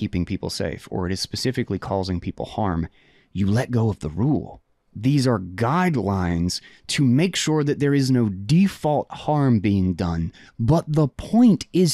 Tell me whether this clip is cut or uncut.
cut